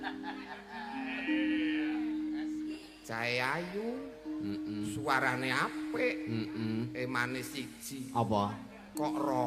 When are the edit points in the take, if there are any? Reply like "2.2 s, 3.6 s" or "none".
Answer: 2.8 s